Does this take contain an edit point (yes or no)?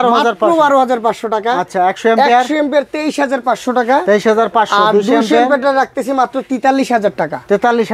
no